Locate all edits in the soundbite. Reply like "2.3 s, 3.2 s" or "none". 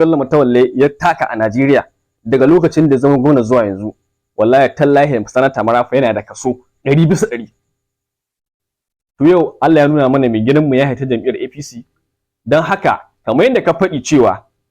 8.2 s